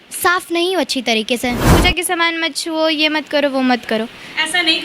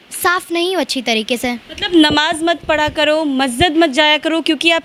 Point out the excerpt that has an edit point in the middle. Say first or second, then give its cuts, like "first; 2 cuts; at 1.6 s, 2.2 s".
first; 1 cut; at 1.6 s